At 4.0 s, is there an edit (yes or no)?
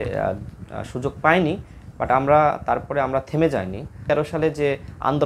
yes